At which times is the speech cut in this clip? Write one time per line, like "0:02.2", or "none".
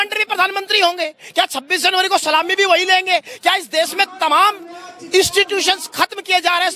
none